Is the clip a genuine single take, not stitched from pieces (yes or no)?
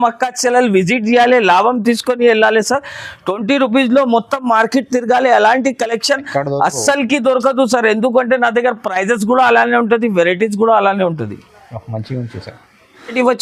yes